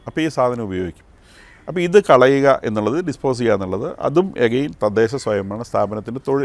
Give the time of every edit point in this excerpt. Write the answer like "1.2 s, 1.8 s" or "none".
none